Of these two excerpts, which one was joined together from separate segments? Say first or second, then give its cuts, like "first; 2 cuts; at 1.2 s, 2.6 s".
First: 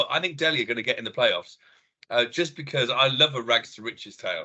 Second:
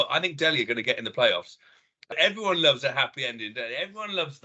second; 1 cut; at 2.1 s